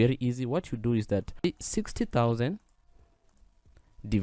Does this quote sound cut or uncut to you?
cut